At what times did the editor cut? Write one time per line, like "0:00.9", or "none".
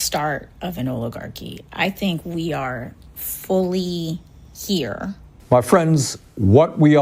0:05.3